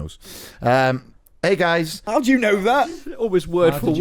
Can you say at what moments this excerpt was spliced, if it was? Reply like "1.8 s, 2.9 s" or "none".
2.0 s, 3.0 s